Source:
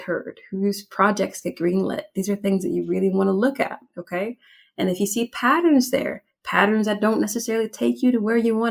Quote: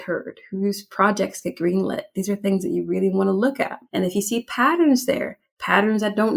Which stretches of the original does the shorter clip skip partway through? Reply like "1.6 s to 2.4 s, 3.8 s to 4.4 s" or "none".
3.8 s to 4.6 s